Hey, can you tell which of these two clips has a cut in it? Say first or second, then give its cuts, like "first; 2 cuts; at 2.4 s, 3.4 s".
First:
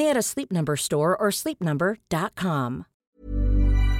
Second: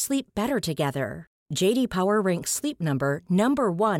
first; 1 cut; at 2.9 s